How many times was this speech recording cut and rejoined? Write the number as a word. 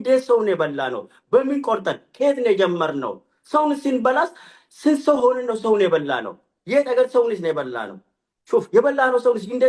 zero